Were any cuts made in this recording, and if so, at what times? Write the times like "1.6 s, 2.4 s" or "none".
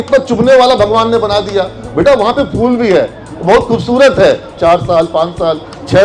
4.6 s